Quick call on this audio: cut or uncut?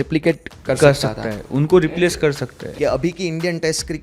cut